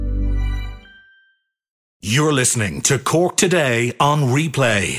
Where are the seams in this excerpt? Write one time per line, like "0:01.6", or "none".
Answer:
0:02.0